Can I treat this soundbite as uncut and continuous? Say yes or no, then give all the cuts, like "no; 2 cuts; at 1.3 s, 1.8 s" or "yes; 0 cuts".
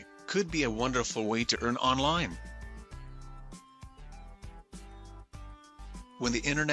no; 2 cuts; at 2.4 s, 5.7 s